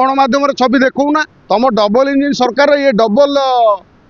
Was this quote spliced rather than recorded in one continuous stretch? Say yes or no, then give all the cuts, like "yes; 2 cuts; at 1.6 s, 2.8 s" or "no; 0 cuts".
yes; 1 cut; at 1.3 s